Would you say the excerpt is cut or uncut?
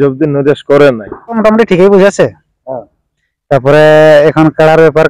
cut